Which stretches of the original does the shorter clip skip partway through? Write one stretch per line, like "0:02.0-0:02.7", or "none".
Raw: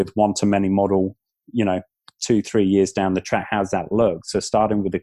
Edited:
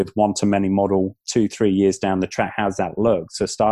0:01.2-0:02.1